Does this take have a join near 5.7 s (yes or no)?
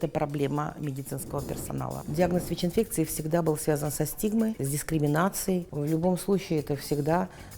yes